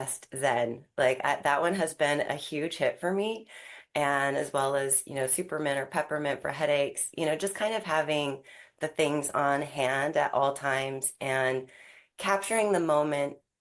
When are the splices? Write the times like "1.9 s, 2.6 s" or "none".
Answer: none